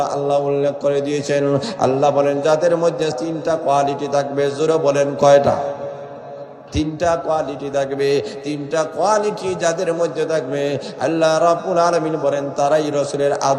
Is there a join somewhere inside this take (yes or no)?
yes